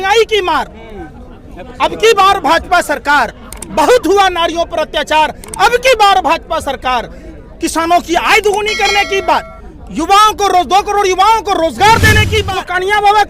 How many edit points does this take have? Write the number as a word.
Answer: one